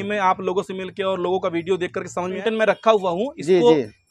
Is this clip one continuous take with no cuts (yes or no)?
no